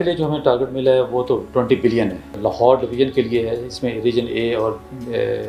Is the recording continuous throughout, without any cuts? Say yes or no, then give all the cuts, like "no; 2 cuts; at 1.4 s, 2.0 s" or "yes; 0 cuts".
no; 1 cut; at 2.3 s